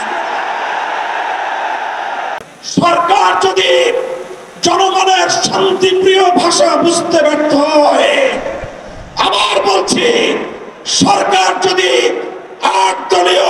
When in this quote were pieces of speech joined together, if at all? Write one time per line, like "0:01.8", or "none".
0:02.4